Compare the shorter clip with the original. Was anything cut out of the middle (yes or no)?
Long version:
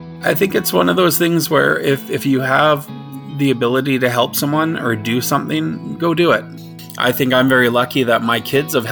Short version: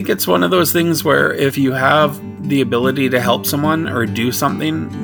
yes